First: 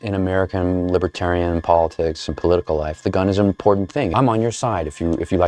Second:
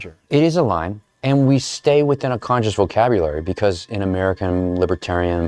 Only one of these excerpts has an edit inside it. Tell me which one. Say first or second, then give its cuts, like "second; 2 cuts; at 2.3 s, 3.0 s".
first; 1 cut; at 4.1 s